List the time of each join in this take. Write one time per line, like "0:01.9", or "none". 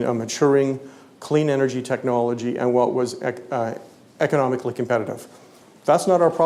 none